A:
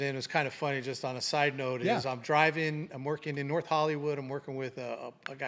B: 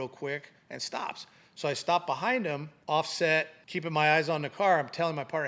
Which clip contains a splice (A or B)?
B